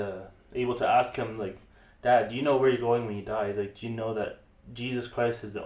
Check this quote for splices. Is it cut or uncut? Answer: uncut